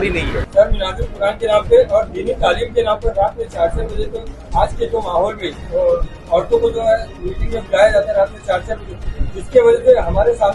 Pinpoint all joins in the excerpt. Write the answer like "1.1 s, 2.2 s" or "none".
none